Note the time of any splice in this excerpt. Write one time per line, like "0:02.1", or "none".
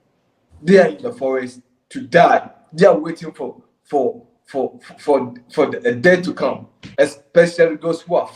0:06.8